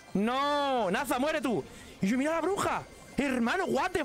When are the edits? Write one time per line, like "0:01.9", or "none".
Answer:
none